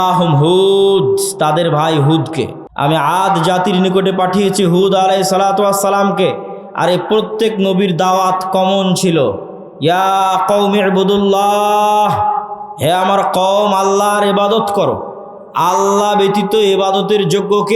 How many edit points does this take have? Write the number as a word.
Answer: one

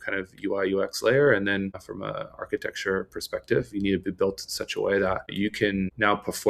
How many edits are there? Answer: two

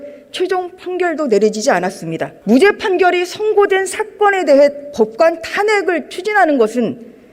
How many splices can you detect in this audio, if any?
one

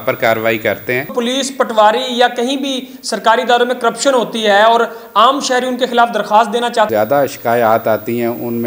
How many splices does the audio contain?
two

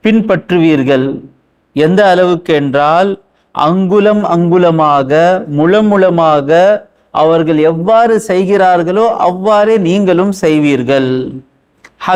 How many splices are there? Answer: zero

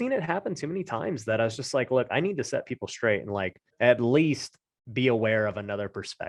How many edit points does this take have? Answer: one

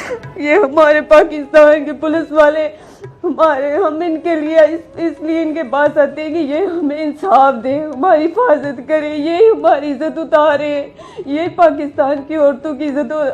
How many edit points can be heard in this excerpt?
zero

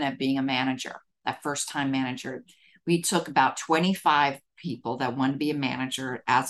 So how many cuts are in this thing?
zero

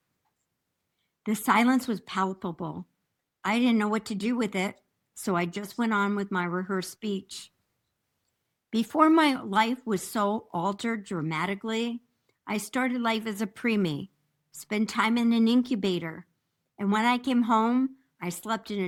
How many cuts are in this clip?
zero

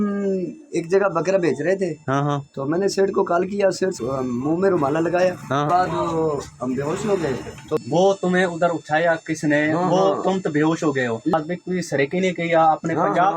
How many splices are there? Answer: four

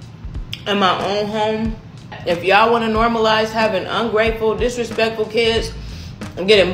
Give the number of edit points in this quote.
one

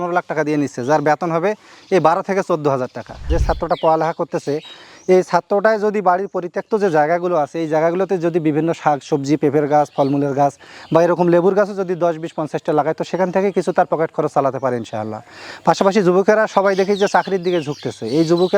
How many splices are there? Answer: one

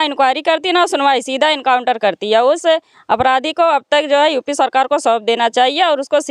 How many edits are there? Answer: zero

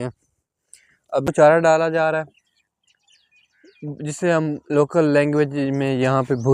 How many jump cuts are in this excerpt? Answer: one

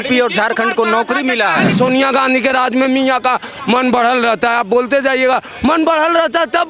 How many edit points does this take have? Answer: one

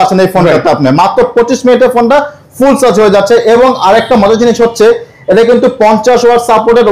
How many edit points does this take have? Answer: zero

